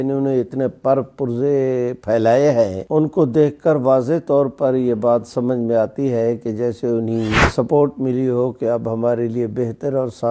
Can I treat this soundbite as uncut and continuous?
no; 2 cuts; at 2.8 s, 7.5 s

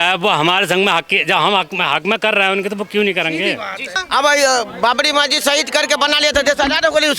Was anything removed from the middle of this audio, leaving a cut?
yes; 1 cut; at 4.0 s

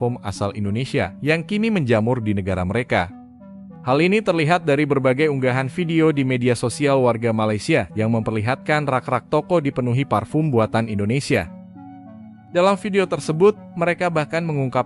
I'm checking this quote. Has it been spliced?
no; 0 cuts

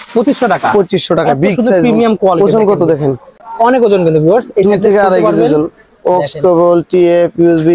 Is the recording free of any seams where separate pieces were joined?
yes; 0 cuts

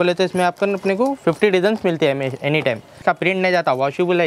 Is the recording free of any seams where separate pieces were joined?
no; 1 cut; at 3.0 s

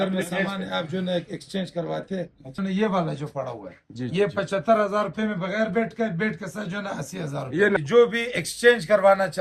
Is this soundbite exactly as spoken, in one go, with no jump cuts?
no; 2 cuts; at 2.6 s, 7.8 s

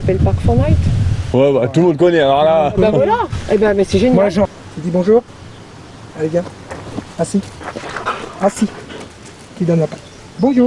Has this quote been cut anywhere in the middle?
yes; 1 cut; at 4.5 s

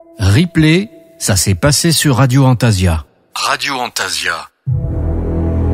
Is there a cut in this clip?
no; 0 cuts

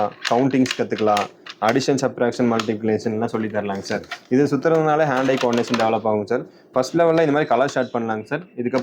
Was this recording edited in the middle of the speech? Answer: no; 0 cuts

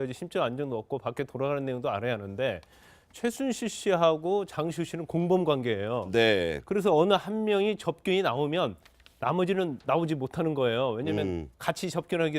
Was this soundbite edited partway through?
yes; 1 cut; at 7.8 s

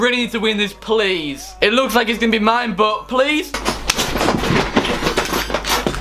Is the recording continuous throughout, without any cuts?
no; 1 cut; at 1.5 s

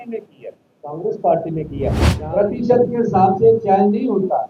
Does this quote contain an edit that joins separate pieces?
yes; 1 cut; at 2.1 s

